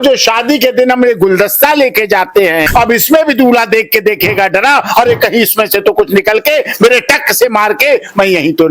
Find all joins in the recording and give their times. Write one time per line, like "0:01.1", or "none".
0:02.7